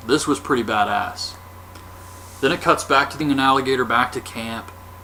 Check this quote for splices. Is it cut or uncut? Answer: uncut